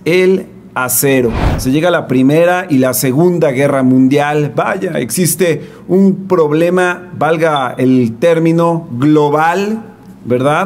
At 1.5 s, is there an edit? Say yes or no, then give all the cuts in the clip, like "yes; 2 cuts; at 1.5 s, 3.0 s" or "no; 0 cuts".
yes; 1 cut; at 1.5 s